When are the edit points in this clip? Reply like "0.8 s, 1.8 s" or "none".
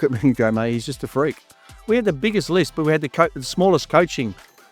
1.7 s